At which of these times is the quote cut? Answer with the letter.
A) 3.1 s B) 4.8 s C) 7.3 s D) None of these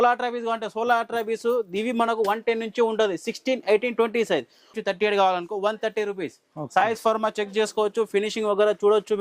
B